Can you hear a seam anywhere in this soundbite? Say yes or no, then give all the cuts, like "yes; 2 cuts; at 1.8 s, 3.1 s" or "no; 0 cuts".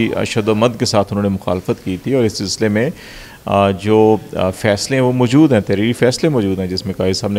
no; 0 cuts